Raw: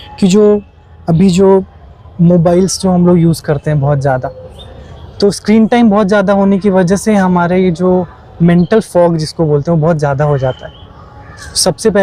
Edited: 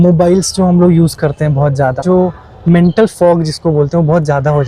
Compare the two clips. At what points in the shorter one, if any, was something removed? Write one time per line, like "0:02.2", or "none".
0:02.0